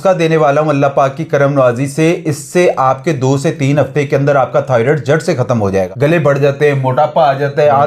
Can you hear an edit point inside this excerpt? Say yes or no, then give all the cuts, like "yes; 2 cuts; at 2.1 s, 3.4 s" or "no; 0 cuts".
yes; 1 cut; at 5.9 s